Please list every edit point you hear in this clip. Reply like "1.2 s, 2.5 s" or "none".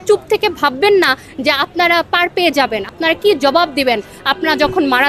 2.9 s